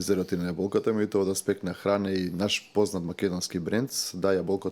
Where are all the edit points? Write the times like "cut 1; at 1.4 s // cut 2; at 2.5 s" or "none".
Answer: none